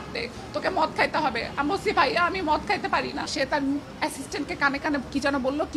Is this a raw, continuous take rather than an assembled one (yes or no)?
no